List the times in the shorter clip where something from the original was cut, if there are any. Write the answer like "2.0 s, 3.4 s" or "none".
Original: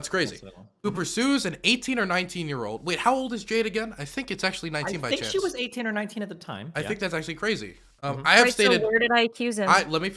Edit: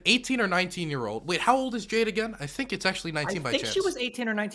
none